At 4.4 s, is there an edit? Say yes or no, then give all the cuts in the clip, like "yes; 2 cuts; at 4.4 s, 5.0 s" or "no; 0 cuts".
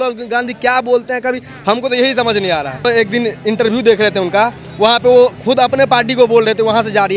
no; 1 cut; at 2.9 s